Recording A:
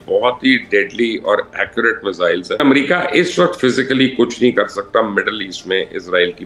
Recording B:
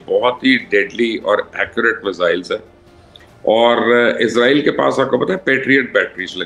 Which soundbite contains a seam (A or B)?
A